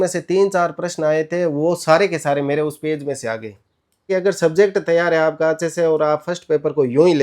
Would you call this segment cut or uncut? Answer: cut